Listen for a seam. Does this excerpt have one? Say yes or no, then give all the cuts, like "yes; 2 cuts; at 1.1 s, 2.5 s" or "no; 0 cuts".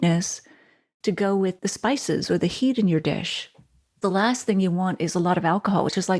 yes; 1 cut; at 4.0 s